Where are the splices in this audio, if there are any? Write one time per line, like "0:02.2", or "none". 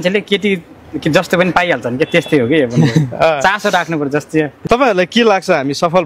0:04.6